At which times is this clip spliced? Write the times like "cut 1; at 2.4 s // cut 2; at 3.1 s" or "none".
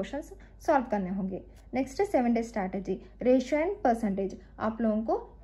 none